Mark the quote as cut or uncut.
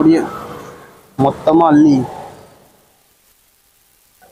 uncut